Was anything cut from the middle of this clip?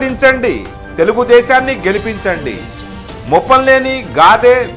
no; 0 cuts

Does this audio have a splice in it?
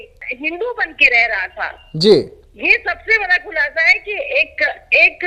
no; 0 cuts

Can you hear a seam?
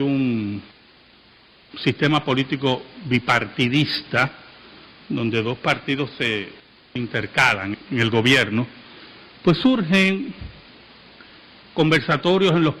no; 0 cuts

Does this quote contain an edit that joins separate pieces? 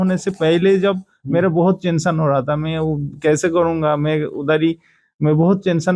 no; 0 cuts

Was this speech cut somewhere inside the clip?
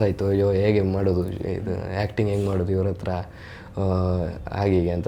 no; 0 cuts

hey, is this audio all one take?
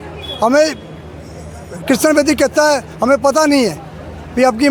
yes; 0 cuts

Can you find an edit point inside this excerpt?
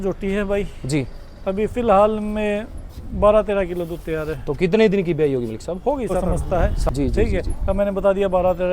yes; 1 cut; at 6.3 s

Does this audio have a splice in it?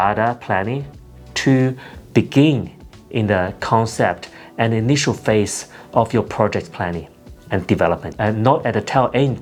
no; 0 cuts

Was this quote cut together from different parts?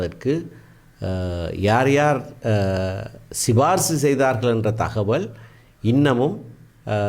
no; 0 cuts

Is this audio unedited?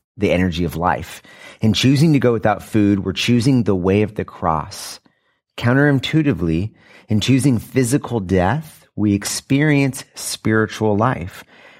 yes; 0 cuts

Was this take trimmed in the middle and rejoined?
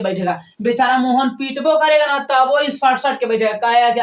no; 0 cuts

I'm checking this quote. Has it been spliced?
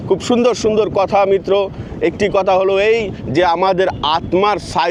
no; 0 cuts

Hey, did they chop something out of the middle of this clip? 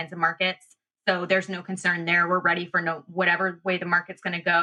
no; 0 cuts

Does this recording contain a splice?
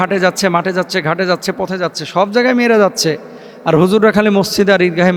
no; 0 cuts

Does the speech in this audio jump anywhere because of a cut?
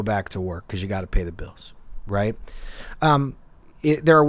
no; 0 cuts

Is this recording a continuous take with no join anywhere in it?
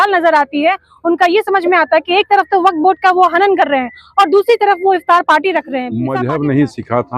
no; 1 cut; at 6.0 s

